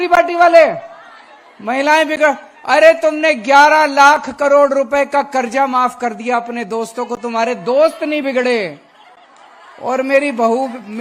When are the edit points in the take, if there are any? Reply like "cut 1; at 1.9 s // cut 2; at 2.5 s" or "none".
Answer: none